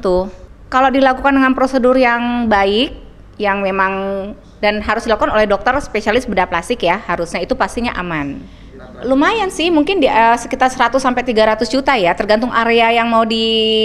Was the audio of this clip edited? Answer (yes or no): yes